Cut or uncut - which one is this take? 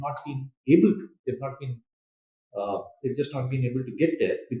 uncut